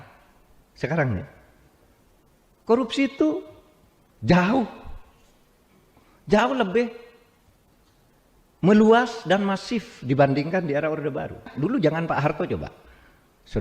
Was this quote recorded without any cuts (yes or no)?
no